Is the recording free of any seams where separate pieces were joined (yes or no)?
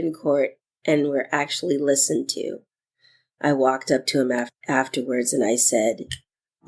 no